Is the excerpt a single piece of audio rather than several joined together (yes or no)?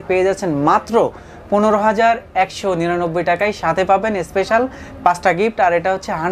yes